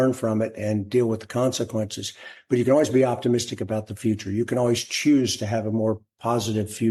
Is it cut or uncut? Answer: uncut